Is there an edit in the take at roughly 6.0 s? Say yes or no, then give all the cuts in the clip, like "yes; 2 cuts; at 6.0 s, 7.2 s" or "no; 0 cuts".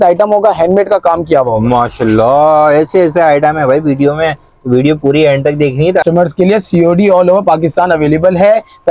yes; 1 cut; at 6.0 s